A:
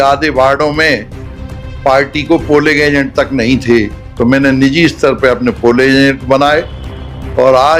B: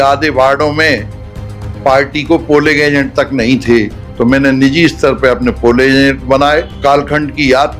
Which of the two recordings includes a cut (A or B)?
B